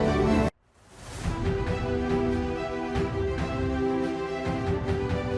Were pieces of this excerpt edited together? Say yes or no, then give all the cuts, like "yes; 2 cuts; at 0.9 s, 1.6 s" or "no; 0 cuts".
no; 0 cuts